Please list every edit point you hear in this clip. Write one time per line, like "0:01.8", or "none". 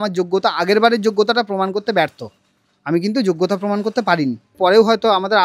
0:04.5